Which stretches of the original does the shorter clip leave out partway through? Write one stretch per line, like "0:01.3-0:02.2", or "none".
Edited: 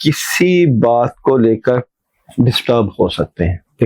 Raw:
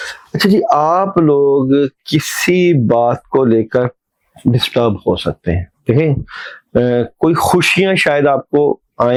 none